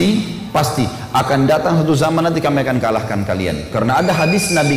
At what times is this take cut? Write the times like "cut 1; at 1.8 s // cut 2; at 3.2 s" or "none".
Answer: none